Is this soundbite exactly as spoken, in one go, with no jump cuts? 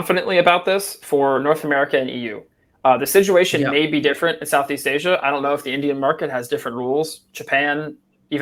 yes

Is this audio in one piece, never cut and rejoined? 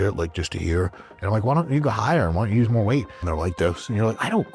no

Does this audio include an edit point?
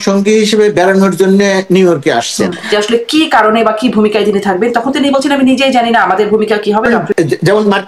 yes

